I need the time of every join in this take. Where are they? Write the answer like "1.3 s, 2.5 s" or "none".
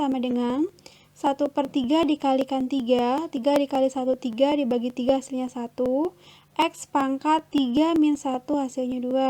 5.5 s